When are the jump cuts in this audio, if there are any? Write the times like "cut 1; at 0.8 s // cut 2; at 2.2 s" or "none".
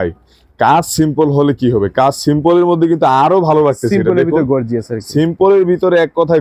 none